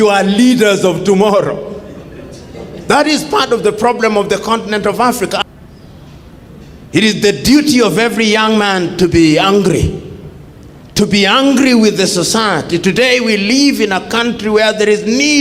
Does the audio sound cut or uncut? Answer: cut